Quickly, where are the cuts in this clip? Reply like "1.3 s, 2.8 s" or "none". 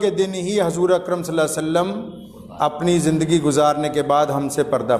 none

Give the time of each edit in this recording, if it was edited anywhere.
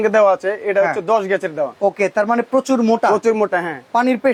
none

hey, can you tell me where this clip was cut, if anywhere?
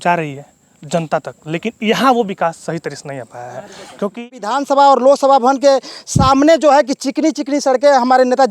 4.3 s

